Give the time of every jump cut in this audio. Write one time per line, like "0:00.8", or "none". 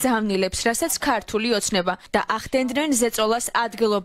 0:02.0